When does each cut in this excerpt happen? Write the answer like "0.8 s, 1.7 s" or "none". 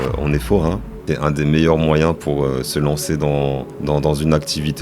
1.0 s, 3.7 s